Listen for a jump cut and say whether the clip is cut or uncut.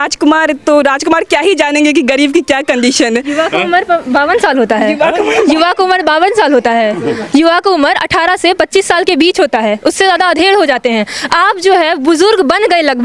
uncut